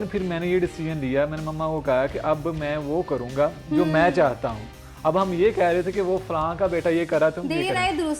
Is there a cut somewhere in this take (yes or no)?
no